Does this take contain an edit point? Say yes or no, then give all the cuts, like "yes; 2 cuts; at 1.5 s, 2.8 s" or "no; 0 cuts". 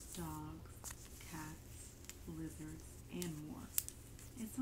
no; 0 cuts